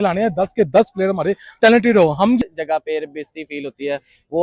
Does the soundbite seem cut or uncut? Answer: cut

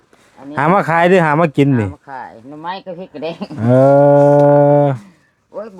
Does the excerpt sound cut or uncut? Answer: uncut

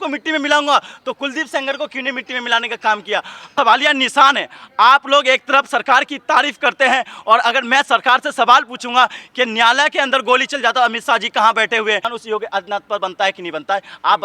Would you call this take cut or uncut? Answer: cut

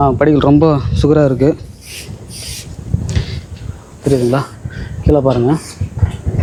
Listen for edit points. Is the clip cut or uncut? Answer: uncut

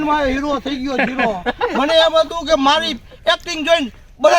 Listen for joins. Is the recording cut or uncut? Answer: uncut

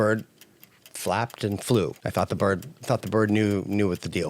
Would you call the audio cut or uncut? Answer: cut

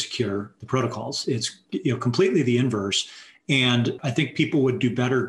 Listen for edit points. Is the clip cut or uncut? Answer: cut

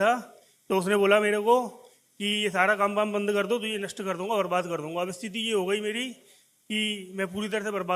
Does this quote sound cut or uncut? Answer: uncut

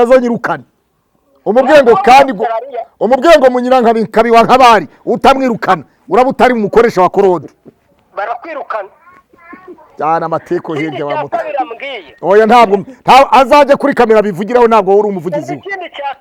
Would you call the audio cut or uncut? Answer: uncut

